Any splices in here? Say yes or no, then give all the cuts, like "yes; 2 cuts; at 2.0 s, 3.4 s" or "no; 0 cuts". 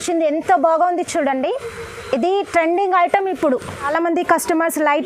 yes; 1 cut; at 3.9 s